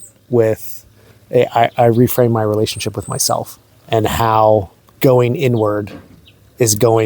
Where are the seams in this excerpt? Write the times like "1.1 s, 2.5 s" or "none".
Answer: 3.8 s, 4.8 s